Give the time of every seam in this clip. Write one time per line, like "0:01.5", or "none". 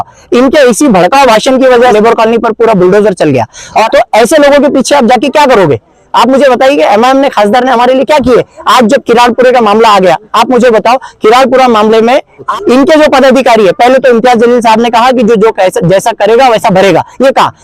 0:01.9
0:03.9
0:12.5